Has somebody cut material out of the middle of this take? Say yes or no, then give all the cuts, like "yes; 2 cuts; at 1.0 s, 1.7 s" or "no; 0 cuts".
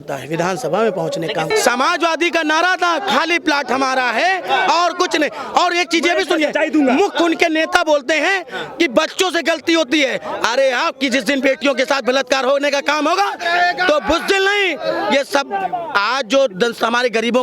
yes; 1 cut; at 1.5 s